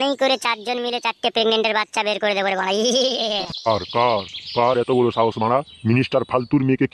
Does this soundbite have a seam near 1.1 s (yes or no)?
no